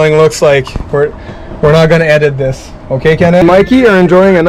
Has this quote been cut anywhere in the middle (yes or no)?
yes